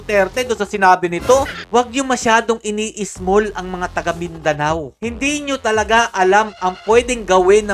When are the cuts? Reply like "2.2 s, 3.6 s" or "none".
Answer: 1.6 s